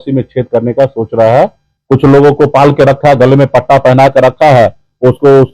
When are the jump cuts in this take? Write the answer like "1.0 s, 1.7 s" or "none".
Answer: 1.7 s